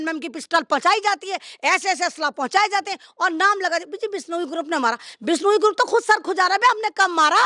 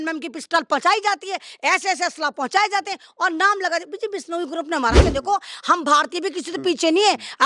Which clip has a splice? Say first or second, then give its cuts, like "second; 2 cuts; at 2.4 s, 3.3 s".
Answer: second; 1 cut; at 5.0 s